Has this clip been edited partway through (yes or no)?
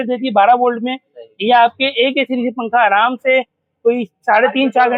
no